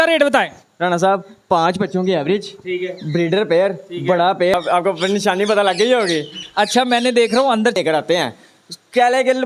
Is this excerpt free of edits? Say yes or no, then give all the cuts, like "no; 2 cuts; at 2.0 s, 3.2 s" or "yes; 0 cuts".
no; 2 cuts; at 4.5 s, 7.8 s